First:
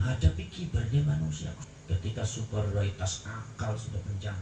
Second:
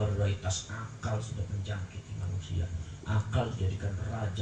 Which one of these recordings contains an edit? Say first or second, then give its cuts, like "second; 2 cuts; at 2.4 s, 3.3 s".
first; 1 cut; at 1.6 s